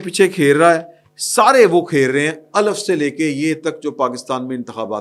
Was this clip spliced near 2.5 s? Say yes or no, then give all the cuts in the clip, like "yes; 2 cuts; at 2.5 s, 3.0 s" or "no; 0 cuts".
no; 0 cuts